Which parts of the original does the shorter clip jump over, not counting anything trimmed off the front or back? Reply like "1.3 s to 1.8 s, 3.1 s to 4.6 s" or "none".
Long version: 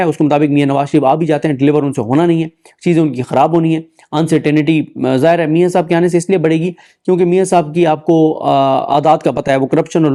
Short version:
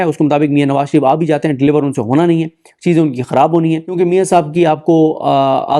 3.9 s to 7.1 s